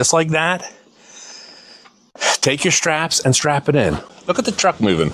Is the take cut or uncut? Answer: cut